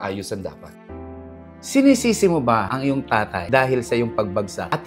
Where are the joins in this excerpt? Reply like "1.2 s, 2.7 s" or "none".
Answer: 1.0 s